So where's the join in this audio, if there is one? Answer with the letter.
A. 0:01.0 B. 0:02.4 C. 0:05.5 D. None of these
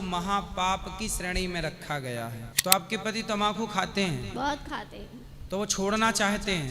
B